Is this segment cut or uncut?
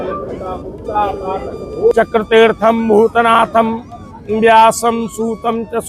cut